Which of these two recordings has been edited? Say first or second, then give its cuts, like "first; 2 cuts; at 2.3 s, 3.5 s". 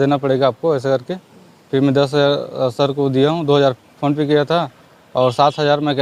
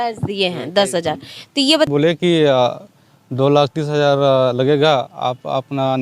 second; 1 cut; at 1.9 s